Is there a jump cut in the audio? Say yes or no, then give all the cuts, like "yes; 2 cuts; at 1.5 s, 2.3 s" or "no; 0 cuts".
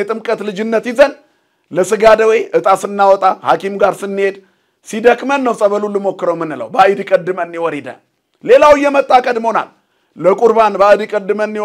no; 0 cuts